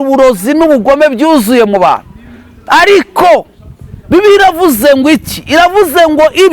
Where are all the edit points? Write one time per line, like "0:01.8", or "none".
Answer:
none